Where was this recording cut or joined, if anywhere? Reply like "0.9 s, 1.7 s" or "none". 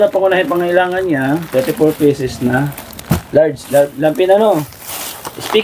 none